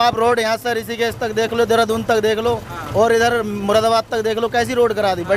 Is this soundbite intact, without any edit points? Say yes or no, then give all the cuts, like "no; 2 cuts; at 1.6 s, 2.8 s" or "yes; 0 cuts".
yes; 0 cuts